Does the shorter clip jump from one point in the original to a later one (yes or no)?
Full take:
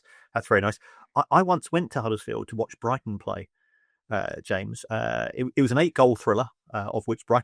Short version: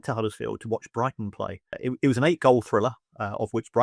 yes